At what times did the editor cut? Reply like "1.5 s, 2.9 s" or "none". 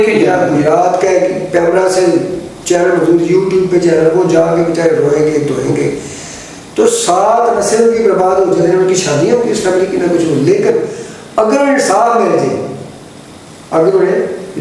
none